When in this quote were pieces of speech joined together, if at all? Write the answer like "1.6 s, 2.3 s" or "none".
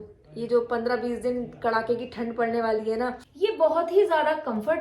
3.2 s